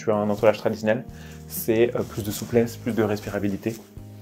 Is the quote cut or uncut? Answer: uncut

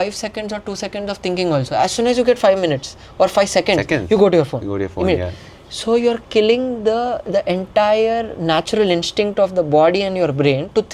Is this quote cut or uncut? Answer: uncut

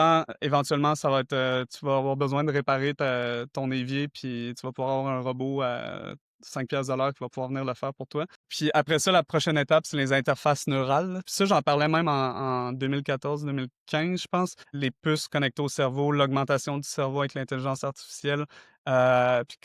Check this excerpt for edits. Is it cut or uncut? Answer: cut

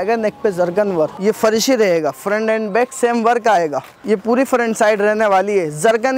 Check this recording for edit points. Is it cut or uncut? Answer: cut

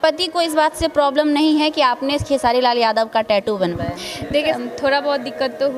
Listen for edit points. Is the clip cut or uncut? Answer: cut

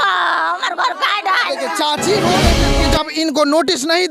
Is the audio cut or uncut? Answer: cut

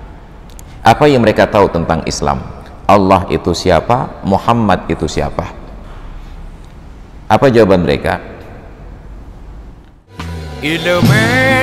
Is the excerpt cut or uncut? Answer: cut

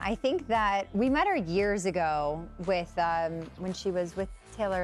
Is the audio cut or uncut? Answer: uncut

